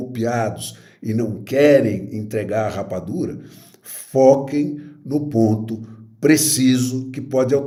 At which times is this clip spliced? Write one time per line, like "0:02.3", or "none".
none